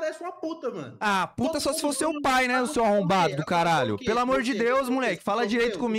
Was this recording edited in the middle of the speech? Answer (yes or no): no